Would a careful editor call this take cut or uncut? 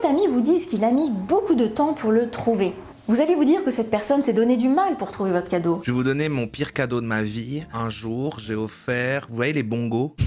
uncut